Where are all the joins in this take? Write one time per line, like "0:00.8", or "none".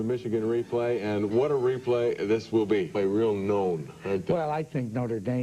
none